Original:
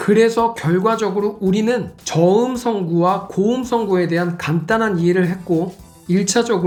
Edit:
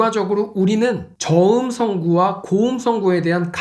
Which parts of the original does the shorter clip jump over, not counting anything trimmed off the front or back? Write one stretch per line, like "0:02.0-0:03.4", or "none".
none